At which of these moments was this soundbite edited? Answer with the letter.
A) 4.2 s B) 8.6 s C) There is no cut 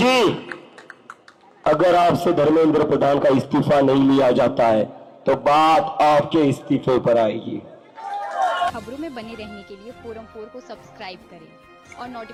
C